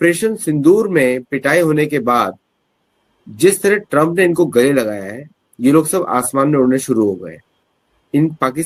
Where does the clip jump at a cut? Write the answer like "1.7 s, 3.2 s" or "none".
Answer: none